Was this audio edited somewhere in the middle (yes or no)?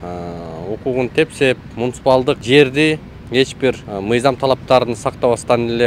yes